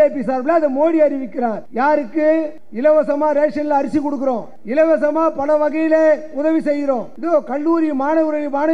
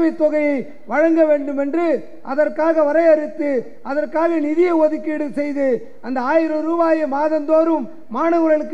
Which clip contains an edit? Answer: first; 4 cuts; at 1.6 s, 2.6 s, 4.5 s, 7.1 s

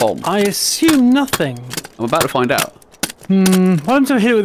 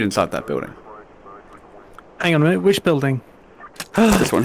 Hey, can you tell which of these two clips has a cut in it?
first; 1 cut; at 2.8 s

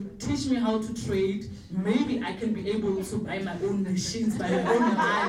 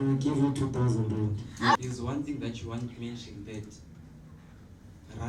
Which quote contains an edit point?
second; 1 cut; at 1.8 s

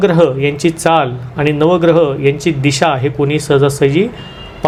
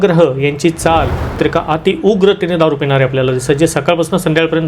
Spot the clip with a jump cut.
second; 1 cut; at 1.3 s

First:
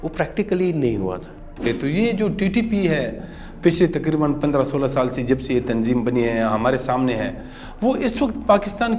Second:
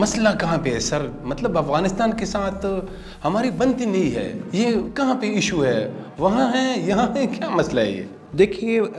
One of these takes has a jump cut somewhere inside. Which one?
first; 1 cut; at 1.6 s

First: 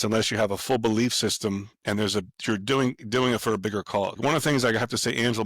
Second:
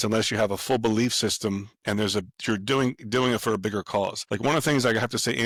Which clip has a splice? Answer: first; 1 cut; at 4.2 s

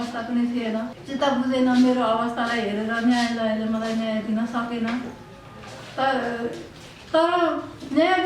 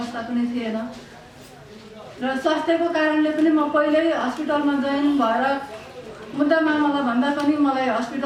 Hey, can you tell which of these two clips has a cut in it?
first; 1 cut; at 1.0 s

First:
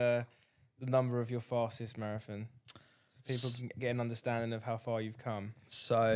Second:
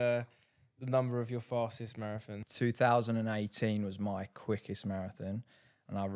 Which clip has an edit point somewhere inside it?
second; 1 cut; at 2.4 s

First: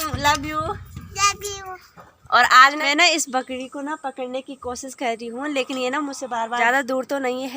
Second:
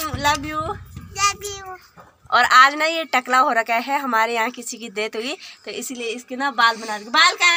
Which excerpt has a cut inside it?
first; 2 cuts; at 2.8 s, 6.6 s

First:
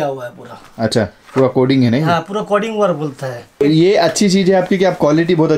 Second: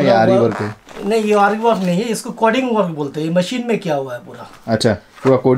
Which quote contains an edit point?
first; 1 cut; at 3.6 s

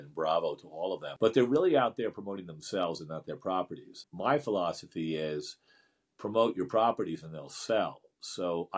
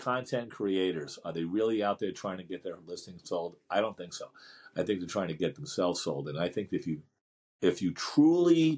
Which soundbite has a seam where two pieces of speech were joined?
first; 2 cuts; at 1.1 s, 4.1 s

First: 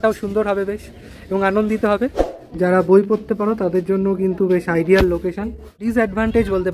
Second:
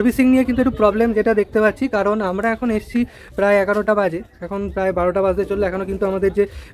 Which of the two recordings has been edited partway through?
first; 2 cuts; at 2.2 s, 5.8 s

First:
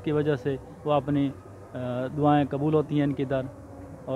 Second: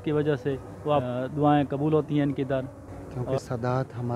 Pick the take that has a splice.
second; 2 cuts; at 1.0 s, 3.2 s

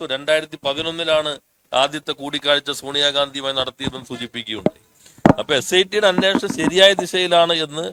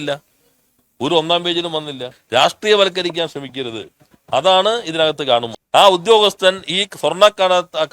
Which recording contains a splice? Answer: second; 2 cuts; at 2.1 s, 5.6 s

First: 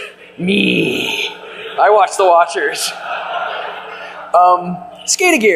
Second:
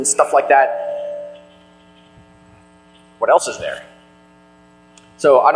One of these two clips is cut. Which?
first; 1 cut; at 2.0 s

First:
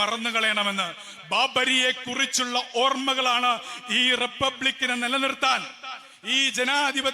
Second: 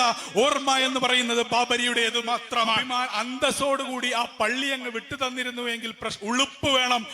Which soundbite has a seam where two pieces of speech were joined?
second; 1 cut; at 2.8 s

